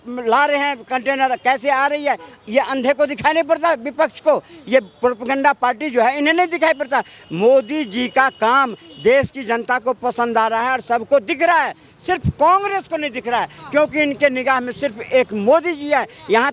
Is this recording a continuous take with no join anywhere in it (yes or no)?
yes